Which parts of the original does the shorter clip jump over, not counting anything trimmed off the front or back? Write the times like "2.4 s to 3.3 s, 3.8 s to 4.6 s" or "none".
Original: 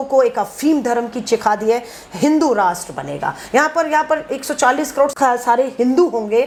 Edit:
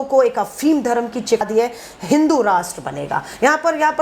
1.4 s to 1.5 s